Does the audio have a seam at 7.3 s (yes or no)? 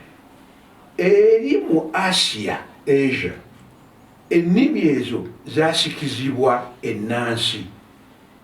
no